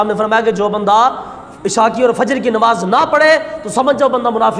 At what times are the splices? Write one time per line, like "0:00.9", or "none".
none